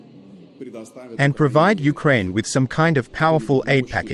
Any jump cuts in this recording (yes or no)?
yes